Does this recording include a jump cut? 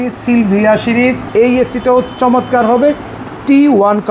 yes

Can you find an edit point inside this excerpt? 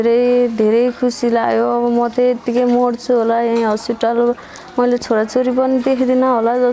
no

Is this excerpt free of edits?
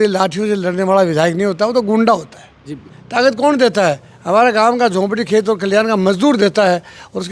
no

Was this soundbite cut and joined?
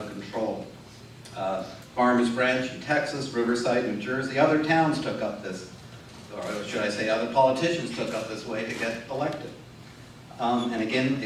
no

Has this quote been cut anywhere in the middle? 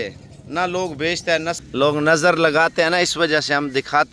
yes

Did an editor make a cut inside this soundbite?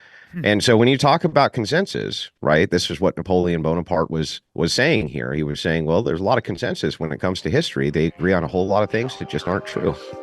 no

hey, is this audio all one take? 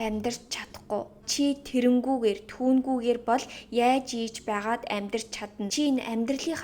no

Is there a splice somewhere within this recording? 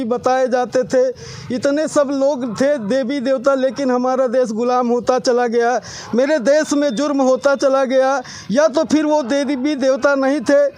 no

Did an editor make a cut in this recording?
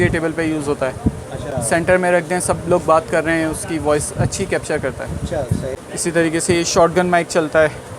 yes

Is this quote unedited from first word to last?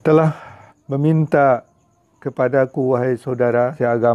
yes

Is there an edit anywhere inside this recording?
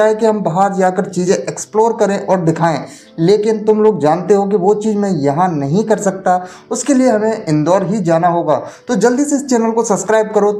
no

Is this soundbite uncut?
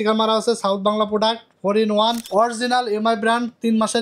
no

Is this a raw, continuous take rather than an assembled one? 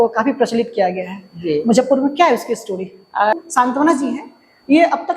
no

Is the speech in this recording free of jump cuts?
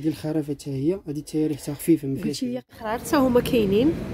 no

